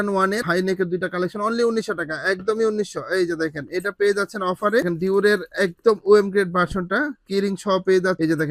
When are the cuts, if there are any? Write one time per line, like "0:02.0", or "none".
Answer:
none